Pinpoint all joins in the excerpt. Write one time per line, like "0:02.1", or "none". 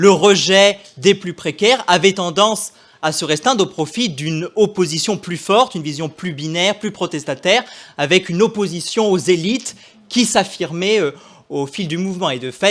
none